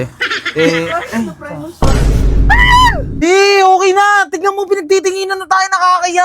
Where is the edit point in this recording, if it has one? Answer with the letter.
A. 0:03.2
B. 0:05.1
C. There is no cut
A